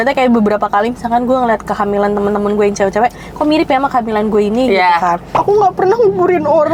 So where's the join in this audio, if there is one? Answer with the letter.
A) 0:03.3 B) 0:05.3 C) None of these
B